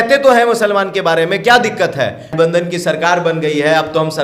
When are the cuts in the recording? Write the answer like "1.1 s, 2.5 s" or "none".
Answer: 2.3 s